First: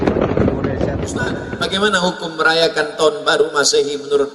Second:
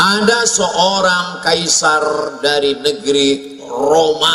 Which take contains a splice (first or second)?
first